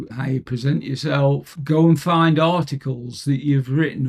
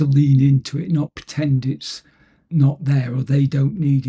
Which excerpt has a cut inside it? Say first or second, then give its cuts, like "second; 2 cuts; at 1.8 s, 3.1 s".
first; 1 cut; at 1.5 s